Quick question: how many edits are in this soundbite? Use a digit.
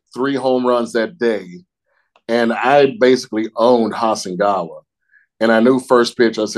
0